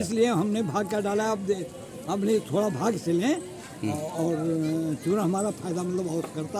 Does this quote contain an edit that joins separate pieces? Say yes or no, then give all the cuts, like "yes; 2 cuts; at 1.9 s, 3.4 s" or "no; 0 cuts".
no; 0 cuts